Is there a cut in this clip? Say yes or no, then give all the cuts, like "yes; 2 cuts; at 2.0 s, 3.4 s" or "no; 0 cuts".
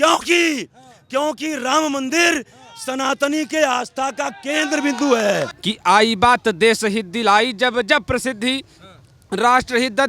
yes; 1 cut; at 5.6 s